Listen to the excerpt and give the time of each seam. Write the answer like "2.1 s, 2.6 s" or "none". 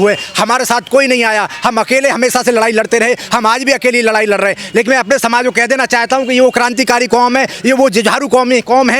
none